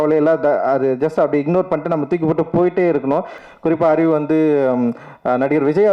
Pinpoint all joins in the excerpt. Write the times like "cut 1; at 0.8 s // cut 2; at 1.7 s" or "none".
cut 1; at 3.4 s